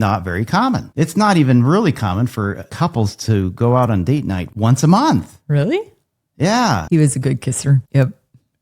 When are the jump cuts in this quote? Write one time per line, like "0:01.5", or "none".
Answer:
0:00.9
0:02.7
0:04.4
0:06.8
0:07.9